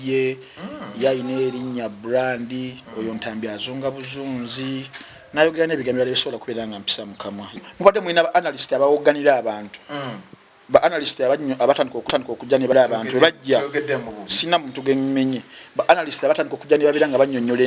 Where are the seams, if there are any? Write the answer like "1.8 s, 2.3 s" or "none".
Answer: 7.6 s